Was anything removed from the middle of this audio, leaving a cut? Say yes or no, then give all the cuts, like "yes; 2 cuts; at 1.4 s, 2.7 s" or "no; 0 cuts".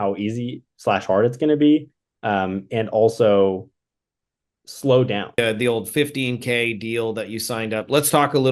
yes; 1 cut; at 5.4 s